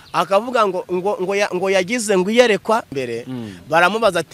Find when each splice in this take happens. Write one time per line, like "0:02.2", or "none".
0:03.0